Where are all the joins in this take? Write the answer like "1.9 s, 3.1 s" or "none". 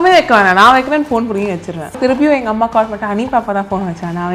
2.0 s